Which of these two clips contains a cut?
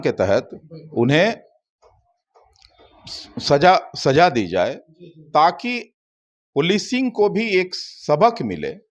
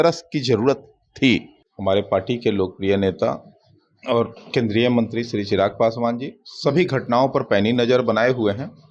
second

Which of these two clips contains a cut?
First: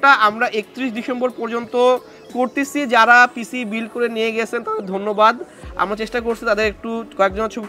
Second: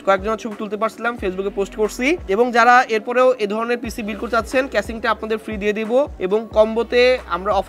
second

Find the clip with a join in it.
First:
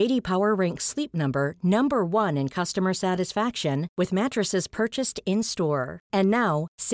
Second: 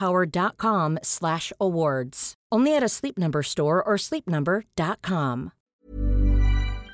second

